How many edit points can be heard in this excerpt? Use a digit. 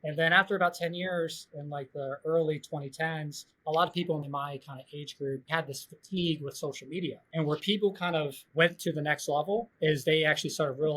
2